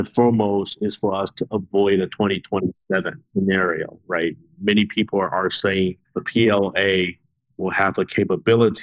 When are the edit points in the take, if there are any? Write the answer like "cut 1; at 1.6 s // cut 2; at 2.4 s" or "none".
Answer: cut 1; at 3.2 s // cut 2; at 6.2 s